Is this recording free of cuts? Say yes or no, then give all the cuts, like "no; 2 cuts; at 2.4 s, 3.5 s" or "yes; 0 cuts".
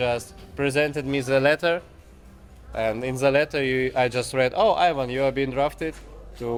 yes; 0 cuts